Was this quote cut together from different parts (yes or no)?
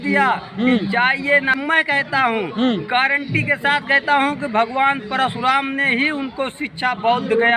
yes